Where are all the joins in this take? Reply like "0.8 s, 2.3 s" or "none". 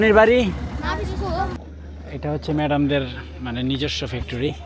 1.6 s